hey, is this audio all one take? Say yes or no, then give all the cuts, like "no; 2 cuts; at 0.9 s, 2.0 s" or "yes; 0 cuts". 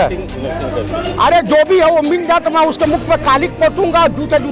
yes; 0 cuts